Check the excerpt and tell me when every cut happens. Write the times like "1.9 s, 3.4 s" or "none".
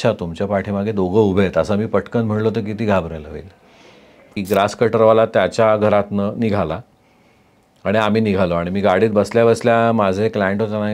4.4 s